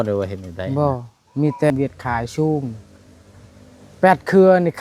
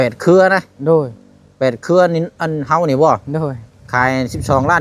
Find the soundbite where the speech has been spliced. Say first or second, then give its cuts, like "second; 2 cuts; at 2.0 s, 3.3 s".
first; 1 cut; at 1.7 s